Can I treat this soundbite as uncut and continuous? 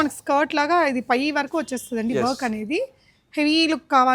yes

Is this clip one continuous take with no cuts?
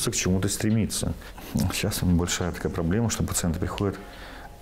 yes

